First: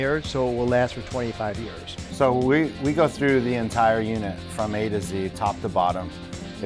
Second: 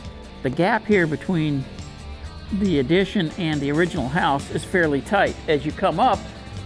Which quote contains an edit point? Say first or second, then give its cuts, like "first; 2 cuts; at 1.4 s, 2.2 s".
first; 1 cut; at 2.0 s